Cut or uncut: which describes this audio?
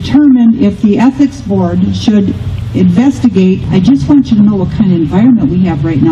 cut